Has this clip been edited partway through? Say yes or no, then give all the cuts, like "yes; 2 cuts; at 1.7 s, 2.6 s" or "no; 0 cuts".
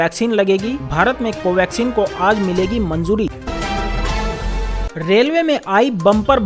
yes; 2 cuts; at 3.3 s, 4.7 s